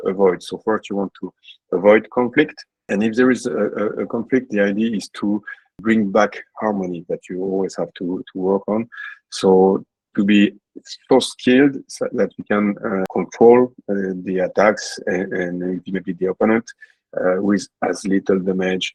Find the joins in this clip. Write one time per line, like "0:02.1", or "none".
none